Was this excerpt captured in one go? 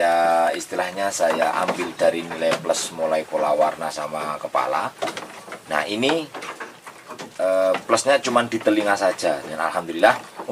yes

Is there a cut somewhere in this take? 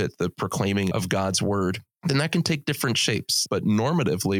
yes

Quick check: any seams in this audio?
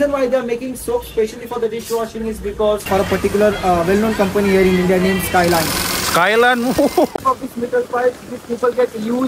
yes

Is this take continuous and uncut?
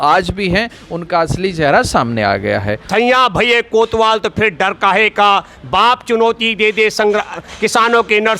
no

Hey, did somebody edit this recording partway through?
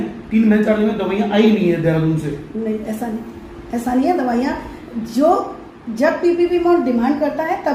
no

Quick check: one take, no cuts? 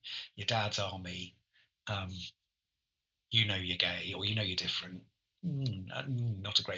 yes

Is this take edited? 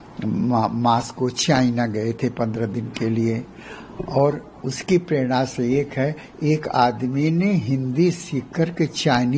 no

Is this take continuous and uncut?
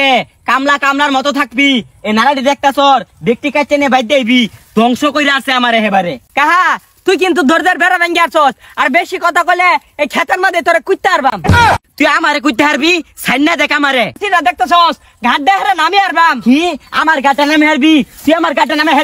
no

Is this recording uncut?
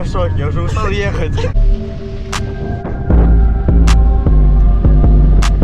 no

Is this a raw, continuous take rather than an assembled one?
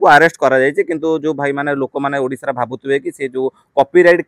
yes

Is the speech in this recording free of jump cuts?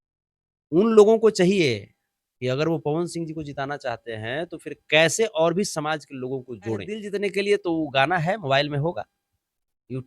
no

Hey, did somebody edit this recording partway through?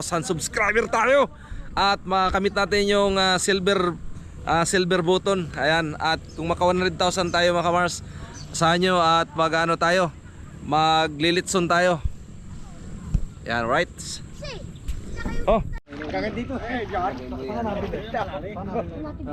no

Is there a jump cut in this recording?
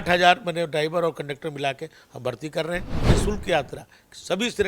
yes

